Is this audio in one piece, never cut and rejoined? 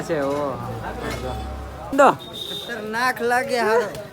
no; 1 cut; at 1.9 s

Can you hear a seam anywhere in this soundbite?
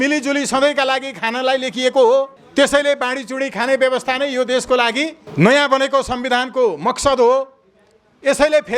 yes; 2 cuts; at 2.4 s, 5.2 s

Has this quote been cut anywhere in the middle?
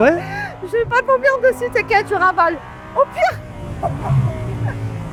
no; 0 cuts

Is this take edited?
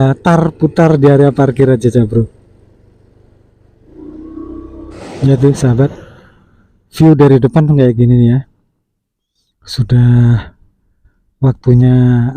yes; 1 cut; at 5.0 s

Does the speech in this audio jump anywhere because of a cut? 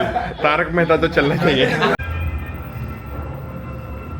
yes; 1 cut; at 1.9 s

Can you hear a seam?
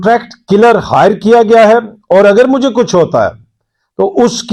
no; 0 cuts

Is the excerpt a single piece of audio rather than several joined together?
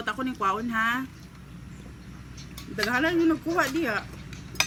yes; 0 cuts

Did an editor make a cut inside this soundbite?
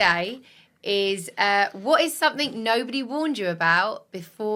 no; 0 cuts

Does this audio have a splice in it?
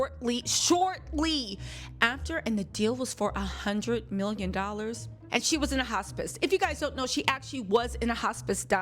yes; 1 cut; at 5.1 s

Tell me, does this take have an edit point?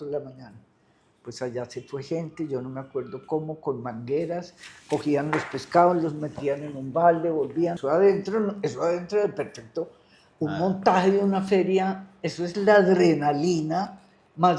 yes; 1 cut; at 7.8 s

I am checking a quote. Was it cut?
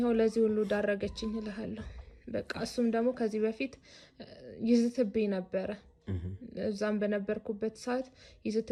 no; 0 cuts

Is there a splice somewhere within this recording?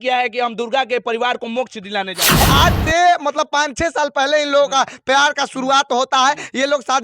yes; 1 cut; at 2.4 s

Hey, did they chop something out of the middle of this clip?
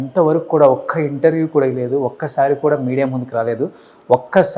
no; 0 cuts

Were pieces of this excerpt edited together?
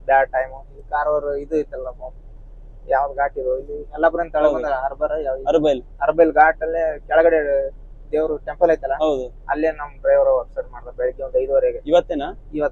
no; 0 cuts

